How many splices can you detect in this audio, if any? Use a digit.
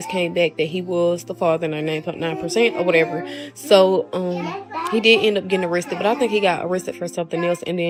0